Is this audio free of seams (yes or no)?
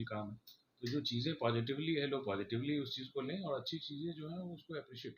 yes